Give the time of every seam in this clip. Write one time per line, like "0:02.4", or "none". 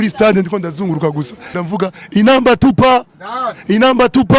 0:01.6